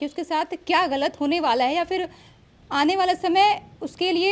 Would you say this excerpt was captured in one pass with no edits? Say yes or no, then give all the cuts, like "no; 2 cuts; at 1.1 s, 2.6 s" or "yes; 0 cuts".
yes; 0 cuts